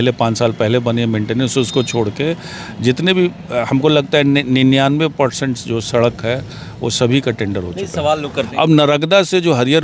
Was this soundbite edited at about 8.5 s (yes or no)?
yes